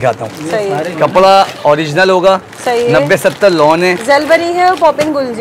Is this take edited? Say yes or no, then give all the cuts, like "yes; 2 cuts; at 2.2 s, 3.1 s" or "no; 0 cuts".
no; 0 cuts